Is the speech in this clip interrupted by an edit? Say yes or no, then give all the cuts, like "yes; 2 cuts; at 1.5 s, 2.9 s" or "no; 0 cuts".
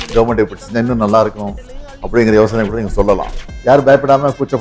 no; 0 cuts